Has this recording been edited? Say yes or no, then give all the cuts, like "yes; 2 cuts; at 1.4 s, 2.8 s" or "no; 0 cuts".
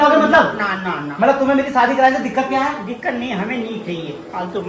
no; 0 cuts